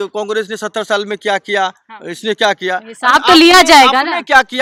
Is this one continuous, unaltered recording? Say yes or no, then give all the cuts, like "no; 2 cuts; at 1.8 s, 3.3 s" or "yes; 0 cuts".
yes; 0 cuts